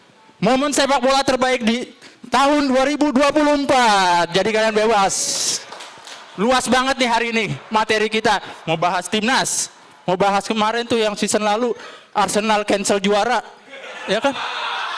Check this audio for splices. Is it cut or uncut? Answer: uncut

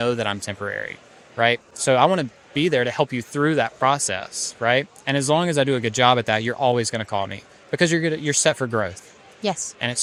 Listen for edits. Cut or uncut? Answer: uncut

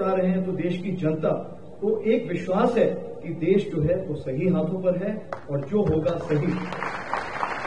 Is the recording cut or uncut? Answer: uncut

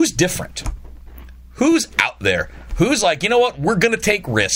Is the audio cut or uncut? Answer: uncut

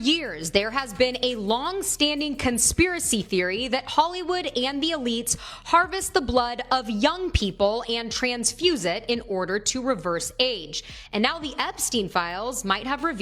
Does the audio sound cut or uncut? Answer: uncut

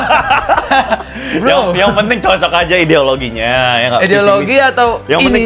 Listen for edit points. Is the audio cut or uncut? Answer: uncut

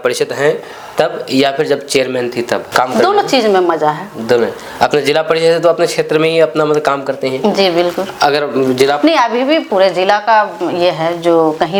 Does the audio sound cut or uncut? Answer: uncut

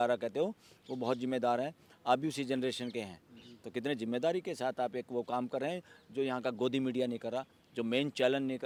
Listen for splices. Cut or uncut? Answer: uncut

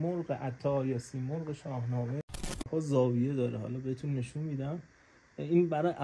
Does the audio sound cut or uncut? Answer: cut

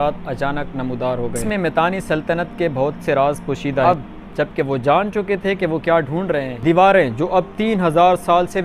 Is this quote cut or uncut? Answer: cut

